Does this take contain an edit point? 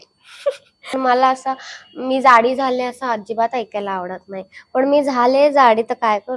yes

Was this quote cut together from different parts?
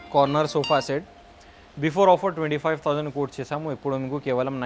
no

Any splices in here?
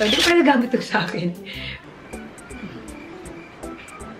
yes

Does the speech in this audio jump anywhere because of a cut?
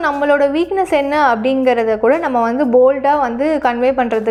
no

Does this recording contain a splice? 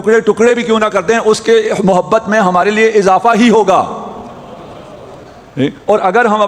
no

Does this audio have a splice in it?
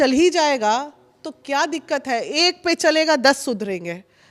no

